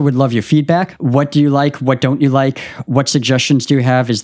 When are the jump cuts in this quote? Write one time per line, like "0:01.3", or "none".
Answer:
0:01.0